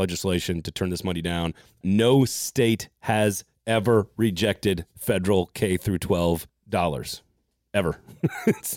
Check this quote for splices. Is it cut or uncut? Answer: cut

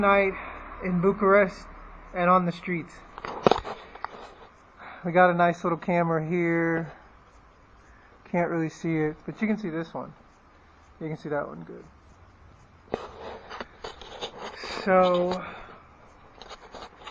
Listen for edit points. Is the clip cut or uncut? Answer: cut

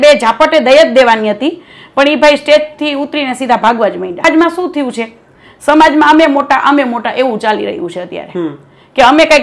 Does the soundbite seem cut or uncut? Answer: cut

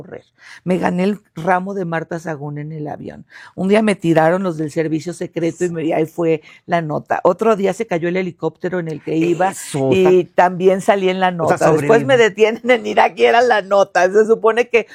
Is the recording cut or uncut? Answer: uncut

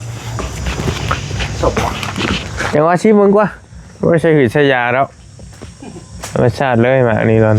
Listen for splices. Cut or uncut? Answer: uncut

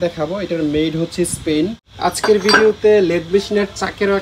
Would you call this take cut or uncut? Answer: cut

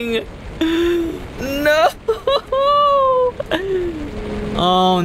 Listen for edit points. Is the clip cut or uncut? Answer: cut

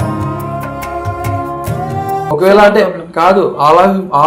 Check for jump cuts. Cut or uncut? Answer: cut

